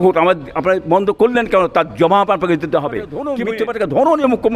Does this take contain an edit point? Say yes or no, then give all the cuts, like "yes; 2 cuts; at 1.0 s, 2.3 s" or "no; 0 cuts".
yes; 1 cut; at 3.3 s